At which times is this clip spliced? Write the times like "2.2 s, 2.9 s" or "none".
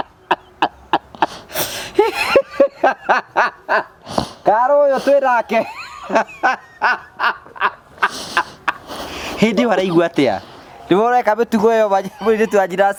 none